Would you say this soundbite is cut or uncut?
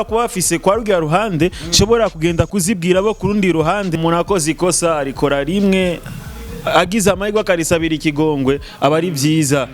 cut